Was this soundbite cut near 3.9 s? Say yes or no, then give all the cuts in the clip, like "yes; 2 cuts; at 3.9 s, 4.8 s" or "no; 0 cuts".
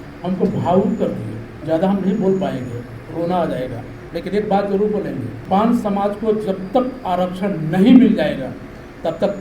yes; 3 cuts; at 1.5 s, 3.9 s, 5.3 s